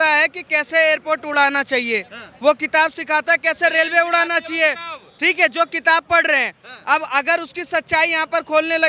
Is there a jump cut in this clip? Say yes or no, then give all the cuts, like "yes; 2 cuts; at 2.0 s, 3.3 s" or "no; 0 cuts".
no; 0 cuts